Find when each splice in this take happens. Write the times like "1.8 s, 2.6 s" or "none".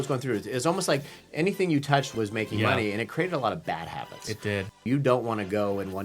2.1 s, 4.8 s